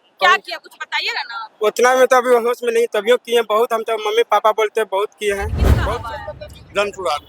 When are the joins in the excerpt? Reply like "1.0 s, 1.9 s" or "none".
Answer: 5.6 s